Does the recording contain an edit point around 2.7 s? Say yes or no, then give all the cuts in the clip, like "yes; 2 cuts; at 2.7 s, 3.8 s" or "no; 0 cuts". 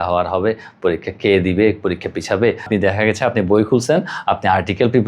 yes; 1 cut; at 2.7 s